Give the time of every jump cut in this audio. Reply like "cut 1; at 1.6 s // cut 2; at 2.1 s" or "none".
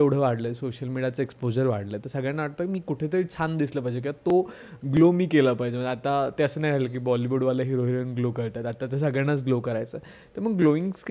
none